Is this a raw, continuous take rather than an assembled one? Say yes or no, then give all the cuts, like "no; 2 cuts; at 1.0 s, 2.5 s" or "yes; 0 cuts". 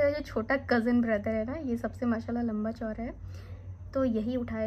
yes; 0 cuts